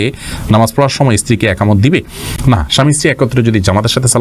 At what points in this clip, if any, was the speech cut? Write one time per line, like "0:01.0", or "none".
none